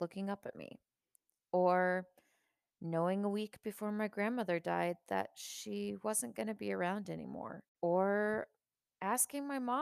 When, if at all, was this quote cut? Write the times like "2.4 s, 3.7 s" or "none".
7.6 s